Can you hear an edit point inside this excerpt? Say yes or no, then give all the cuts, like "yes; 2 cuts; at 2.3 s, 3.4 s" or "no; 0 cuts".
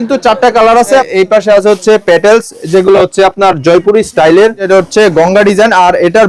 yes; 2 cuts; at 1.1 s, 4.6 s